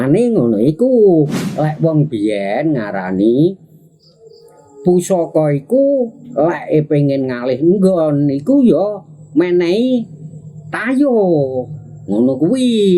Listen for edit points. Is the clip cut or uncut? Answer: cut